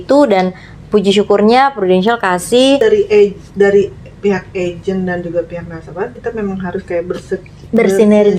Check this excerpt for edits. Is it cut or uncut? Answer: cut